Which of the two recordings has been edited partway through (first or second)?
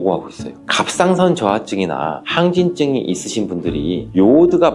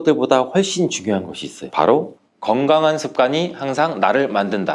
second